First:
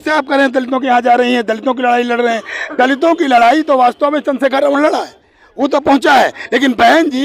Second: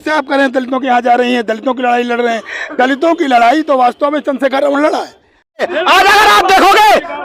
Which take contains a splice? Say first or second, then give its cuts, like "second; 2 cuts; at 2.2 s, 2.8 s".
second; 1 cut; at 5.6 s